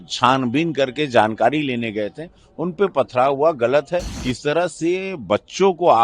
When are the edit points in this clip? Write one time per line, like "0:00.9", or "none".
0:04.2

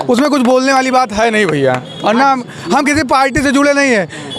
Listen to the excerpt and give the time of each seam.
none

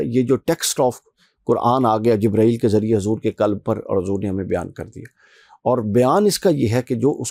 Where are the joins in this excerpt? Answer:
none

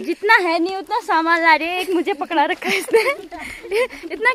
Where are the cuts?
none

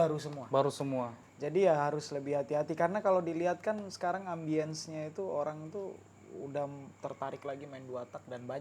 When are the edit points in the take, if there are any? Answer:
0:01.2

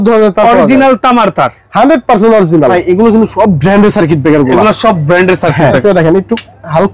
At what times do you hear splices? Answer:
0:02.7
0:05.8

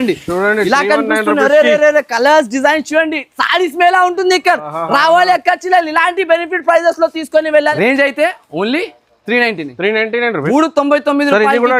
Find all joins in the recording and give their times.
0:07.7

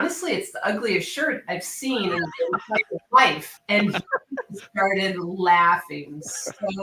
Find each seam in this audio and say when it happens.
none

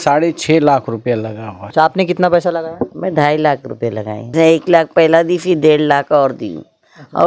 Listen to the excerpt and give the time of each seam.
0:01.7
0:04.3

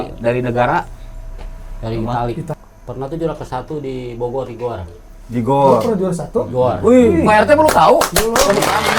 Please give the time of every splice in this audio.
0:02.5

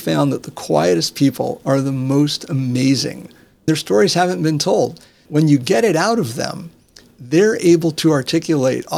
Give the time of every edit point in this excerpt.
0:03.7
0:05.2
0:07.1

